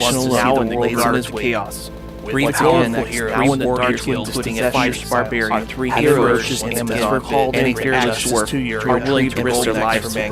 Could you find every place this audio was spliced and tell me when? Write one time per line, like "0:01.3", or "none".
0:04.9